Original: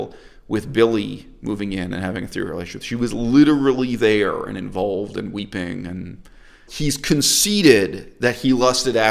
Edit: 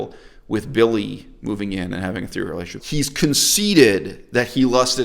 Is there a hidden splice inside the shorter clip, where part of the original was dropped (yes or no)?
yes